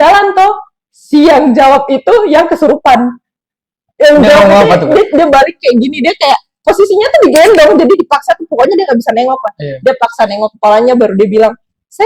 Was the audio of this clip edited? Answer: no; 0 cuts

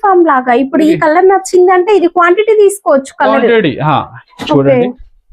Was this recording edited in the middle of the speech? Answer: no; 0 cuts

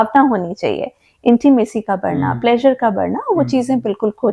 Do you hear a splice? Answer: no; 0 cuts

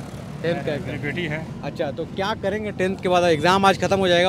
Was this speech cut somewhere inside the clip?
no; 0 cuts

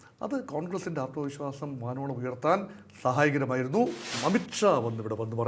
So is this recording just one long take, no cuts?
no; 1 cut; at 4.1 s

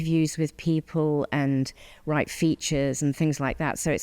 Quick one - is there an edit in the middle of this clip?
no; 0 cuts

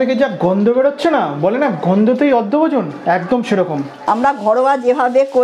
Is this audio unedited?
no; 1 cut; at 3.9 s

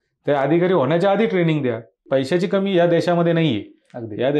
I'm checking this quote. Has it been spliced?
yes; 1 cut; at 2.0 s

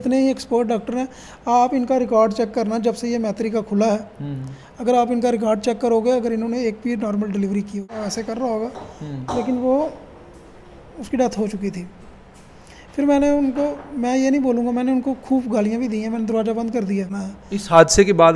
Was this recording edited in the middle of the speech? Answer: yes; 2 cuts; at 7.9 s, 17.1 s

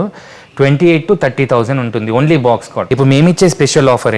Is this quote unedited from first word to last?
no; 1 cut; at 2.8 s

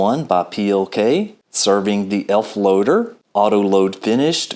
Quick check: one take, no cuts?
no; 2 cuts; at 1.4 s, 3.2 s

